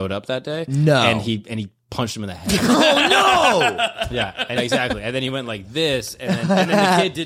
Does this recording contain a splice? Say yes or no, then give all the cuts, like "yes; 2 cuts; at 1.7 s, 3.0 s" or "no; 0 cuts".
yes; 1 cut; at 4.6 s